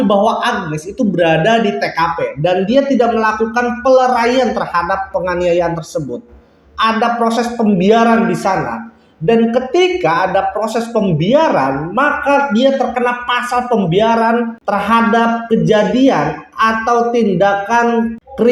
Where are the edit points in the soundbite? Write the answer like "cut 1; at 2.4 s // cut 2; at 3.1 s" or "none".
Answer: none